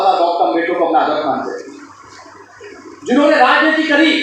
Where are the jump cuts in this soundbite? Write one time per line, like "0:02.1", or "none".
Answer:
none